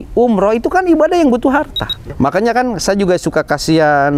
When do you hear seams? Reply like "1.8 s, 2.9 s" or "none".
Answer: 2.1 s